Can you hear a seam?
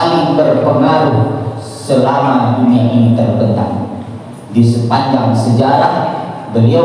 no; 0 cuts

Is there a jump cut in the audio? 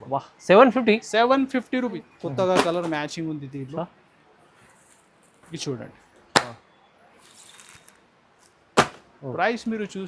yes; 1 cut; at 2.1 s

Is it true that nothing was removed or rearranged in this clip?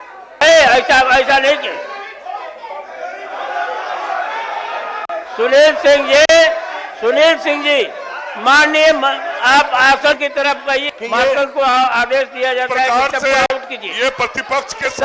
yes; 0 cuts

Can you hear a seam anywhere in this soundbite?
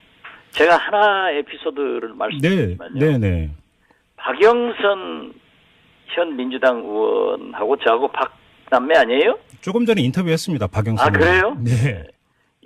no; 0 cuts

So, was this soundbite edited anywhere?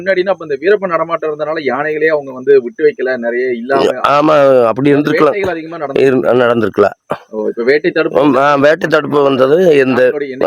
no; 0 cuts

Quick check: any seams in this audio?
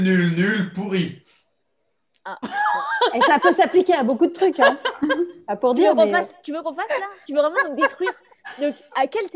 no; 0 cuts

